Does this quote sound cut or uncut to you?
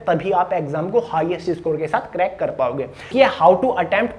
cut